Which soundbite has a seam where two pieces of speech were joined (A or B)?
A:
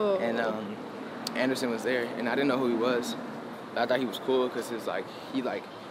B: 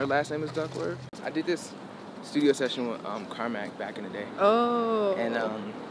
B